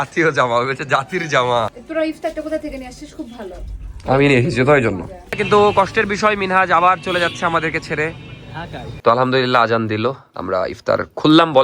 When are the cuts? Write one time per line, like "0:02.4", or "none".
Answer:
0:01.8
0:05.3
0:09.0